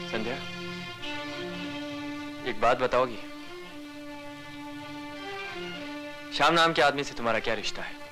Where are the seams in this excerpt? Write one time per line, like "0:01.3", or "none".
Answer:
none